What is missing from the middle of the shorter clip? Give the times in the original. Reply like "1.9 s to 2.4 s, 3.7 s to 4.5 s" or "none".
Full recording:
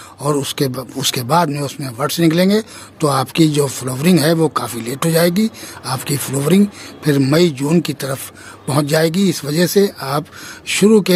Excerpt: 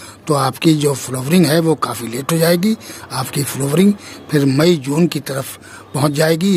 none